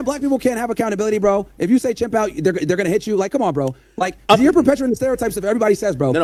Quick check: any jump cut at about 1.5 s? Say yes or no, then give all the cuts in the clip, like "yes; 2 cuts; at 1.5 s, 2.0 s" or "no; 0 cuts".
no; 0 cuts